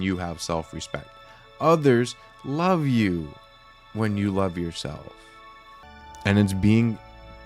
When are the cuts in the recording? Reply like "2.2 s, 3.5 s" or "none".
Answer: 5.9 s